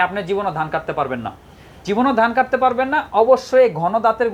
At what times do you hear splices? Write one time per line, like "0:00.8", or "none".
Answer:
none